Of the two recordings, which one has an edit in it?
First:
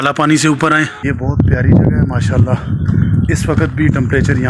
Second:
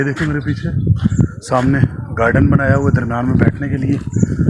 first; 1 cut; at 1.0 s

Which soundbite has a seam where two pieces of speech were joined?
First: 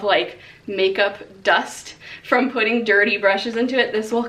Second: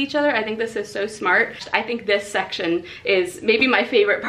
second; 1 cut; at 1.6 s

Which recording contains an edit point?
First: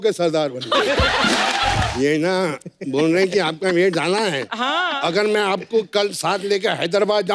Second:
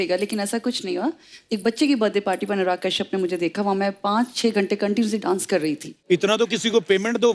first; 1 cut; at 1.9 s

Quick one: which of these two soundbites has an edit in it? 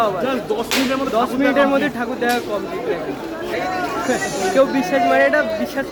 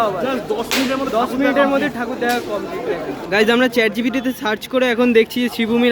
second; 1 cut; at 3.2 s

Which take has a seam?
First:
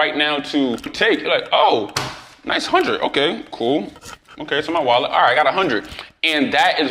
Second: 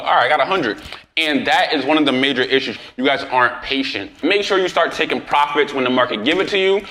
second; 1 cut; at 3.0 s

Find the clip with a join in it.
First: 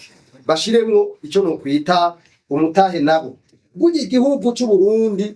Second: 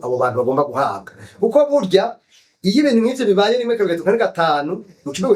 first; 1 cut; at 3.6 s

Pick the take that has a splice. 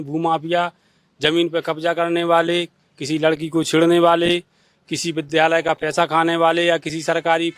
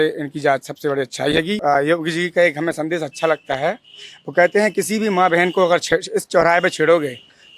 second; 1 cut; at 1.6 s

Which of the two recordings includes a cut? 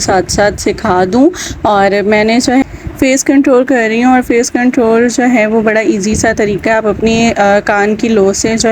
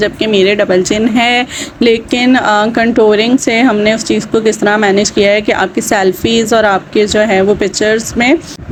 first; 1 cut; at 2.6 s

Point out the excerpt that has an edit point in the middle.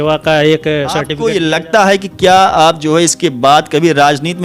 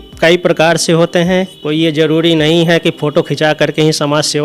first; 1 cut; at 1.1 s

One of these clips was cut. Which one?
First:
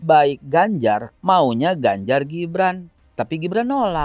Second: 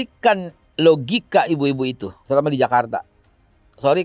second; 1 cut; at 2.1 s

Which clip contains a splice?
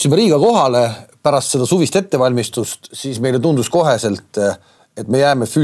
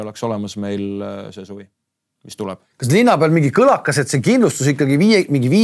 second; 1 cut; at 2.7 s

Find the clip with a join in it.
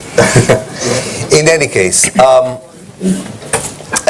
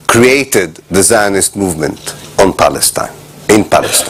first; 1 cut; at 1.5 s

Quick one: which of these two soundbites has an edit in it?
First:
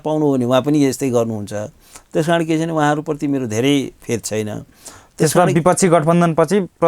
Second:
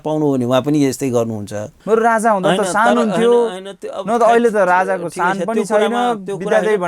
second; 1 cut; at 1.7 s

